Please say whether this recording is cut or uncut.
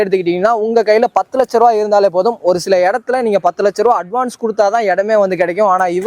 uncut